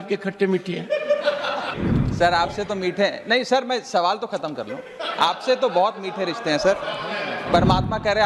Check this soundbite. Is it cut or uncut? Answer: cut